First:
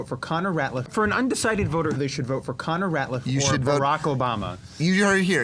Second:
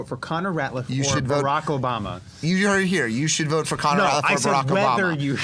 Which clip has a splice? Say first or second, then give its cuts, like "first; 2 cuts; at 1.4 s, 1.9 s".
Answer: first; 2 cuts; at 0.9 s, 2.0 s